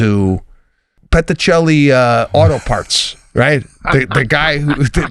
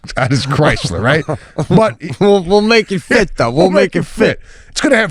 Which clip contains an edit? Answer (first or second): first